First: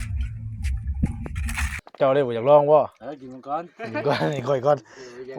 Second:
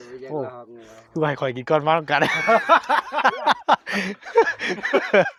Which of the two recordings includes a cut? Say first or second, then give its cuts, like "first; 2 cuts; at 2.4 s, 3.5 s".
first; 1 cut; at 1.7 s